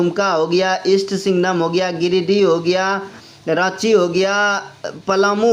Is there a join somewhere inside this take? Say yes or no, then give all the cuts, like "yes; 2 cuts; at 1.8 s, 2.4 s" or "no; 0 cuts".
no; 0 cuts